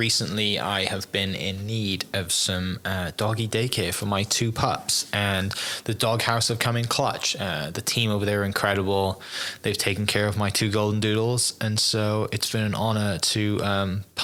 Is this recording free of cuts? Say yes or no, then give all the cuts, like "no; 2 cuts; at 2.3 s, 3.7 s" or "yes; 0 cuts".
yes; 0 cuts